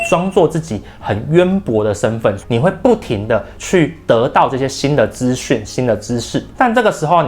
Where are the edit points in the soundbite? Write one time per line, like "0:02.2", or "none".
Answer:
none